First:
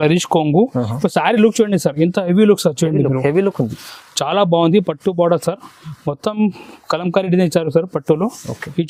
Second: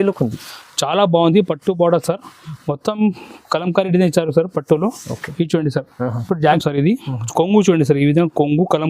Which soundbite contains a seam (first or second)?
second